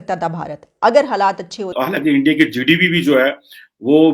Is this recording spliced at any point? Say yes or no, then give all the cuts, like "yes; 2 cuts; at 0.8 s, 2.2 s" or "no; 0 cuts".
yes; 1 cut; at 1.7 s